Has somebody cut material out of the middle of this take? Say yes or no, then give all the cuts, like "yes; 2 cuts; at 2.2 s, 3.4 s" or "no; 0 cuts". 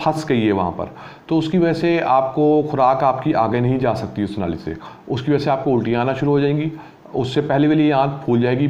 no; 0 cuts